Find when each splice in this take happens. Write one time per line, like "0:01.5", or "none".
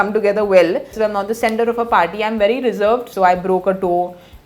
0:00.9
0:03.1